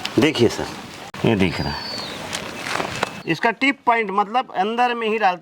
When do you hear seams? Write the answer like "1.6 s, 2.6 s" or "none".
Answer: 1.0 s, 3.1 s